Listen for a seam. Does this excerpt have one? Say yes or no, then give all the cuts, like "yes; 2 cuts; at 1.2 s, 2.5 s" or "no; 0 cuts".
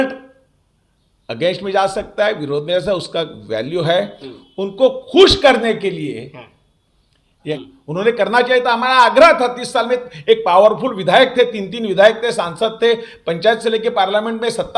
yes; 1 cut; at 7.5 s